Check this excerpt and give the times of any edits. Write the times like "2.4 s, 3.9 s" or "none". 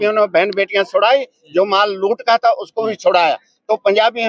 none